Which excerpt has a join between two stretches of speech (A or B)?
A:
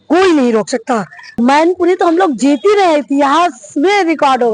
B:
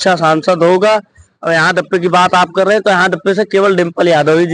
A